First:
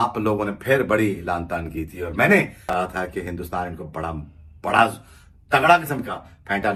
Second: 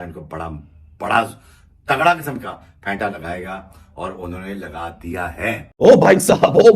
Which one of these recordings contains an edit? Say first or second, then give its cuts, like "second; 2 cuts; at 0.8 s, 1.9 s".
second; 1 cut; at 5.7 s